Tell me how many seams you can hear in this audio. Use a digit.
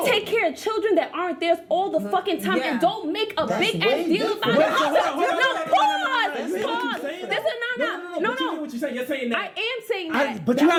0